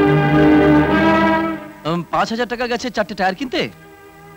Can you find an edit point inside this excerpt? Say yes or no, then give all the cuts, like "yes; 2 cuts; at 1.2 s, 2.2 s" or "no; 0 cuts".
no; 0 cuts